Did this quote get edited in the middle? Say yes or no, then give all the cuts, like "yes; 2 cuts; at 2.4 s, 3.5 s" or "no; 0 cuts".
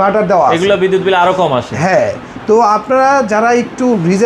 no; 0 cuts